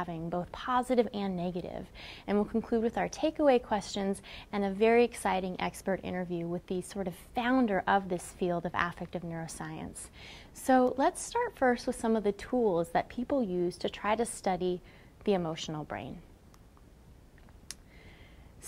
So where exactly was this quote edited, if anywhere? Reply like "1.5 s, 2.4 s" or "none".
8.2 s